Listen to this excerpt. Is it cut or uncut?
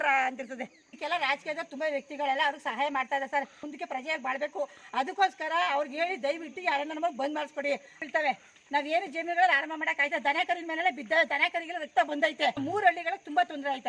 cut